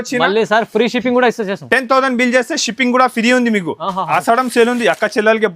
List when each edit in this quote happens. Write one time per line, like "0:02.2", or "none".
0:04.0